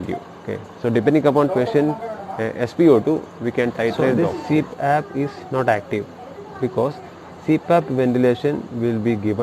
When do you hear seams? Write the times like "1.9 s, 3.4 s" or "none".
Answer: 4.2 s